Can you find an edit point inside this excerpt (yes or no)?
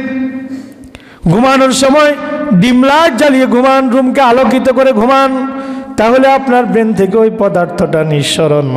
yes